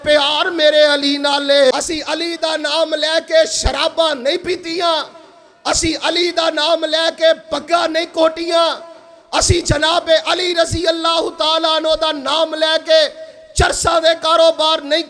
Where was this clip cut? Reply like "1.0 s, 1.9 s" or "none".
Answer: 1.7 s